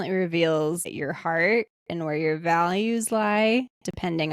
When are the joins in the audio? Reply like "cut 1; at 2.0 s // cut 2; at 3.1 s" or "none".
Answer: cut 1; at 0.9 s